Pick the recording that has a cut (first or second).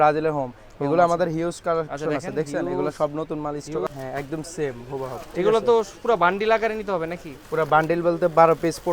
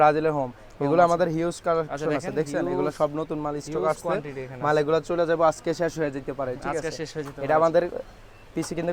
first